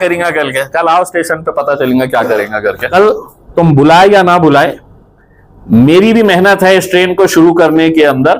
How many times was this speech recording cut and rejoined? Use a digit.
1